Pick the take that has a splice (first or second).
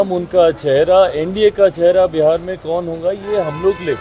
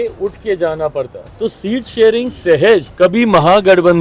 second